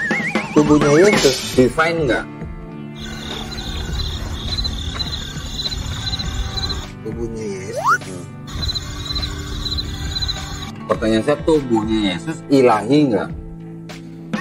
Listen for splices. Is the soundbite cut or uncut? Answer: uncut